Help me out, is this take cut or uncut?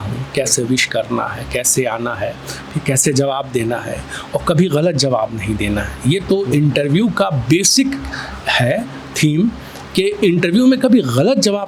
uncut